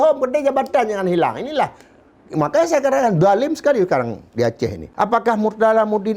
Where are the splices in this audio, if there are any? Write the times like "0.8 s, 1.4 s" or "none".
4.8 s